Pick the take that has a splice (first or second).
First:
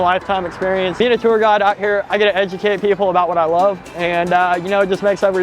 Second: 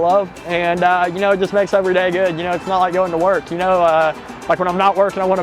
first